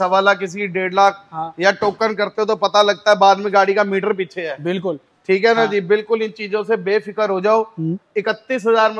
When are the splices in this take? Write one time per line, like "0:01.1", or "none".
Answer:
none